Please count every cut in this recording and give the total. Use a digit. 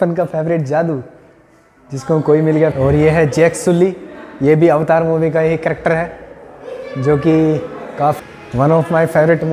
2